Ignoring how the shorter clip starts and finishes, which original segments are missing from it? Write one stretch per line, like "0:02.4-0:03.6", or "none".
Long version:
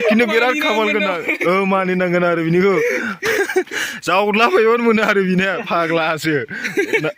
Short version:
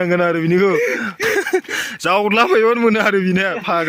none